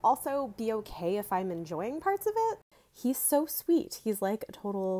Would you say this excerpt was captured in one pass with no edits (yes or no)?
no